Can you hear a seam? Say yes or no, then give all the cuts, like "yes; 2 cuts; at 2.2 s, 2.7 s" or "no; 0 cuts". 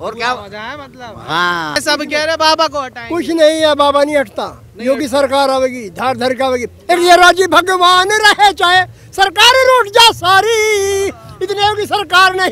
yes; 1 cut; at 1.8 s